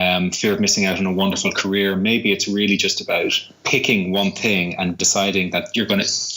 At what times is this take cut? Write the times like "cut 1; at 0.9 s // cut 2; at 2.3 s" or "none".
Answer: cut 1; at 5.0 s

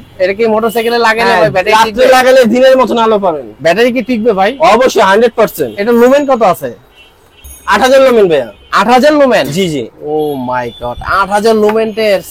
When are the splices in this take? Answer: none

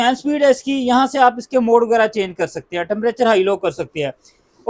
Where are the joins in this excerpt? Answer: none

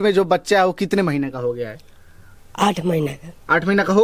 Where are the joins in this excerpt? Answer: none

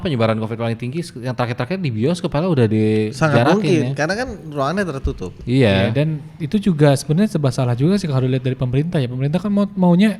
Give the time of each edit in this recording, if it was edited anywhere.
none

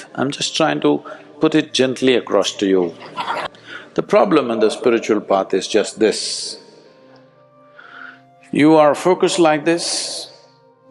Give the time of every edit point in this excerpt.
cut 1; at 3.4 s

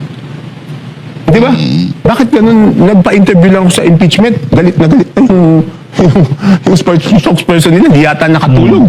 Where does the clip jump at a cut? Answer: cut 1; at 1.0 s

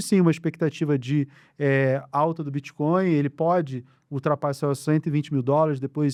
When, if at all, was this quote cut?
none

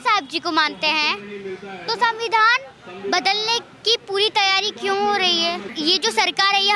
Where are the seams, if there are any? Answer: cut 1; at 5.7 s

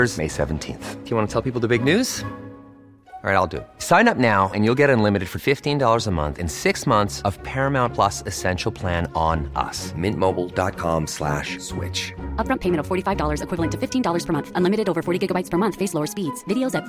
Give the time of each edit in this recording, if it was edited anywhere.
none

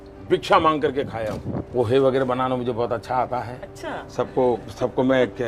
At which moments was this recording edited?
cut 1; at 1.7 s

